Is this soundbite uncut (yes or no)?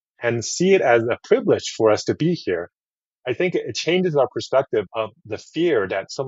yes